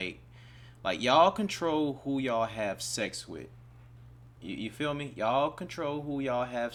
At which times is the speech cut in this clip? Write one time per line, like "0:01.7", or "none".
none